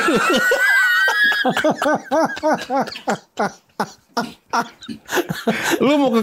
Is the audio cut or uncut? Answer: uncut